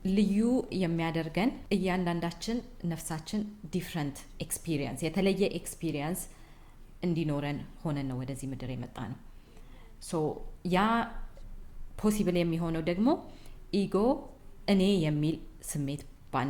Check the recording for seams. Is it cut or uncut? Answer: uncut